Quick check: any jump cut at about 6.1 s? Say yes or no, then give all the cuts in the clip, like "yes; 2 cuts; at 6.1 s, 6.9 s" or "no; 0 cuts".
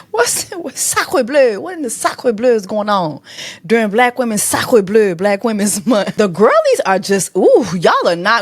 yes; 1 cut; at 6.1 s